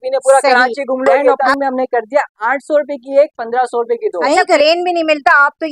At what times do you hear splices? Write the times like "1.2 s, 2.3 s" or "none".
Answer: 1.5 s, 4.6 s

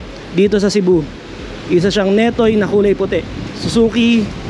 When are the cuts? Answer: none

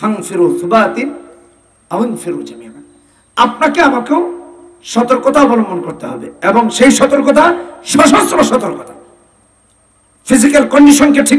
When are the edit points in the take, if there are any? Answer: none

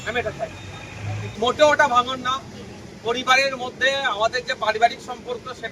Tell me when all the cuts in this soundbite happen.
1.3 s

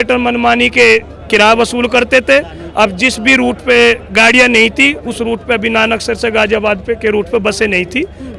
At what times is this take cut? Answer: none

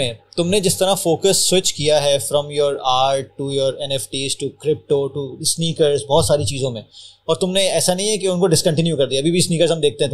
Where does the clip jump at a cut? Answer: none

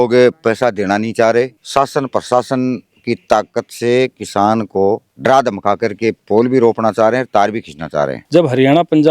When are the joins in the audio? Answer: 1.6 s, 8.2 s

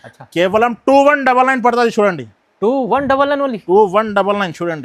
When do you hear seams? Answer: none

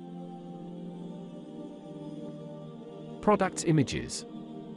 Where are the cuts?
3.2 s, 4.0 s

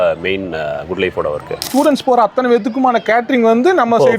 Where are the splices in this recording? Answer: 1.7 s

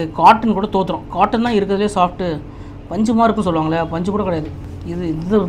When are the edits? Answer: none

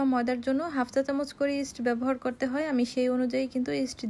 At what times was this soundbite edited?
none

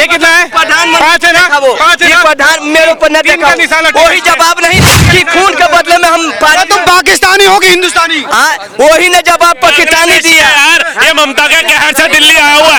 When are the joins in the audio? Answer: none

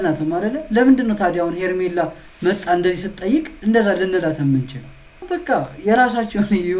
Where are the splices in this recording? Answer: 5.3 s

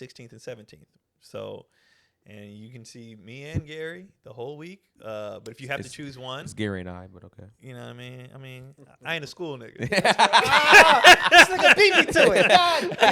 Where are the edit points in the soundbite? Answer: none

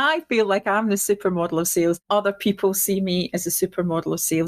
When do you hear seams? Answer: 2.0 s

